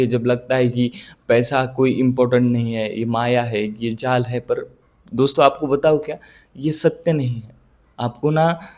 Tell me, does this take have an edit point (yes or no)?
no